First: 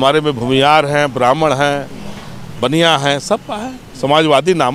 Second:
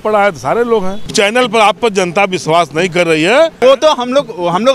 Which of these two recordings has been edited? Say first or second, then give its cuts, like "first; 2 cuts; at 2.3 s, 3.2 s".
second; 2 cuts; at 1.1 s, 3.5 s